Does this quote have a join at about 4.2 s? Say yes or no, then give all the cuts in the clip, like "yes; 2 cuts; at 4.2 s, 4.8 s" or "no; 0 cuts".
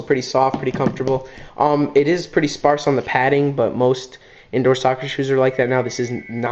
no; 0 cuts